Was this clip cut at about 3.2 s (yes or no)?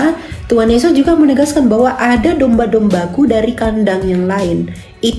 no